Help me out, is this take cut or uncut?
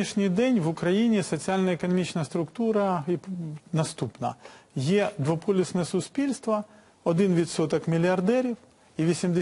cut